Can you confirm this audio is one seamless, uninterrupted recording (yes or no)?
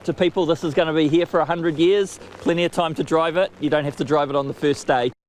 yes